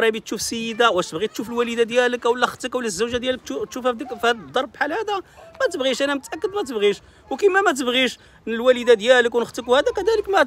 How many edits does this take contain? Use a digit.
0